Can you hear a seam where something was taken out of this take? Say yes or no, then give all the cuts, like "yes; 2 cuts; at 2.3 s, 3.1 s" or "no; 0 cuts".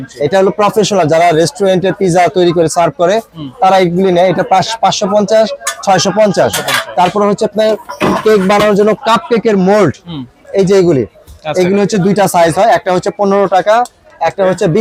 no; 0 cuts